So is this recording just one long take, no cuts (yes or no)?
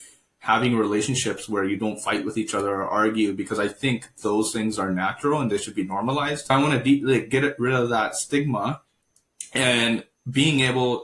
no